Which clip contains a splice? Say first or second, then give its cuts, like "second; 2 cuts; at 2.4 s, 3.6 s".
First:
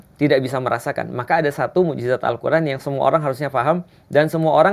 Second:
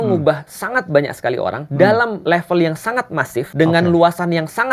second; 3 cuts; at 1.6 s, 2.2 s, 3.5 s